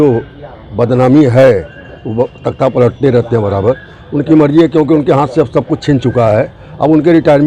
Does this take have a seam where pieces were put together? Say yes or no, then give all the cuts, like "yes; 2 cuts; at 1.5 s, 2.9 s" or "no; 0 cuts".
no; 0 cuts